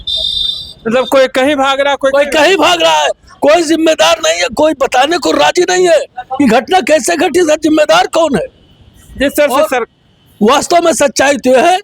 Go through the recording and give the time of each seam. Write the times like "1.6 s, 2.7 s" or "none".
none